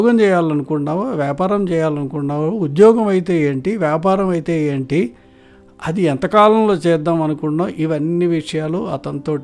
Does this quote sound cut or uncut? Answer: uncut